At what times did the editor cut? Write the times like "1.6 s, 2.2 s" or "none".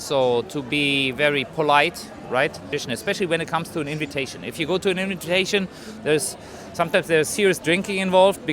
2.7 s